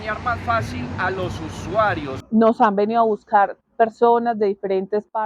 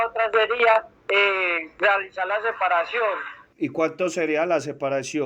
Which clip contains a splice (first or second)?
first